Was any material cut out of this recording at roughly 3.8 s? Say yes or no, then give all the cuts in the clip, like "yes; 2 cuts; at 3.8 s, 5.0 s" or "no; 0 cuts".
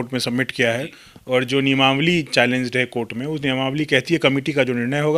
no; 0 cuts